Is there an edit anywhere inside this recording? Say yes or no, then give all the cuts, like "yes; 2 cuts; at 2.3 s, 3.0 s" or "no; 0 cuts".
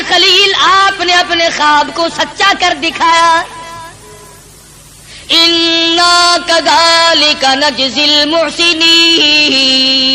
no; 0 cuts